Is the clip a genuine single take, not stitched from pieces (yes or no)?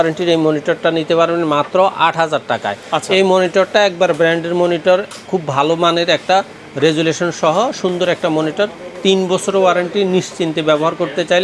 yes